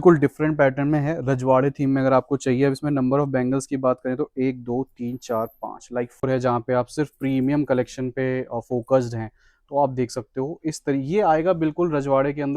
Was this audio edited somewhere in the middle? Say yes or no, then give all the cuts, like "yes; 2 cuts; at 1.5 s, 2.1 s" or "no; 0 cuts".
yes; 1 cut; at 6.2 s